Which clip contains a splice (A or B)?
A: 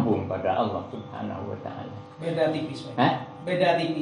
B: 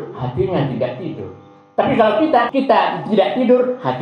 B